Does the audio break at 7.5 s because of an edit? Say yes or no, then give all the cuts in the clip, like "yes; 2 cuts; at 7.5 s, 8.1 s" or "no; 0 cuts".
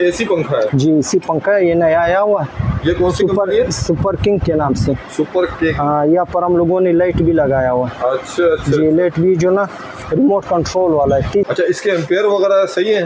no; 1 cut; at 11.5 s